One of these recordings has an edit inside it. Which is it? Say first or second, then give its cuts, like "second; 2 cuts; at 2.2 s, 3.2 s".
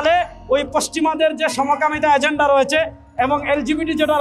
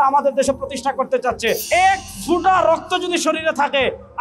second; 1 cut; at 1.6 s